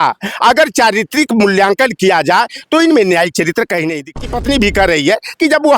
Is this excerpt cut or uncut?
cut